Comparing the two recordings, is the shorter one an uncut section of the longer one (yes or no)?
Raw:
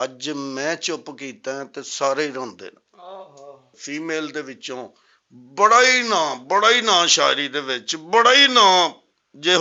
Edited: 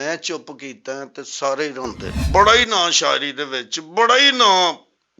no